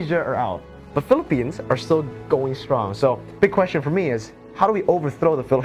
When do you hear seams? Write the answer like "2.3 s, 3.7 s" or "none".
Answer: none